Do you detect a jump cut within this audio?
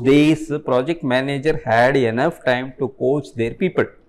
no; 0 cuts

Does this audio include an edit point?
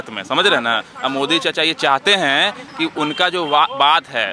no; 0 cuts

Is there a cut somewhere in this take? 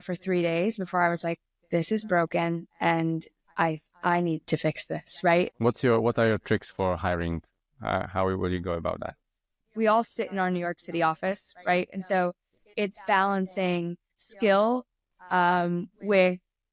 yes; 2 cuts; at 5.5 s, 9.6 s

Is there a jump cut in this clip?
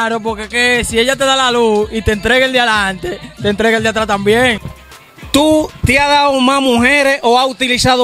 yes; 1 cut; at 4.6 s

